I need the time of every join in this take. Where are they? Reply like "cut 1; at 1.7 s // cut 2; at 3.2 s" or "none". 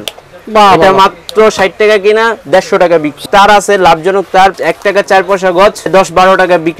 cut 1; at 3.1 s // cut 2; at 4.6 s // cut 3; at 5.9 s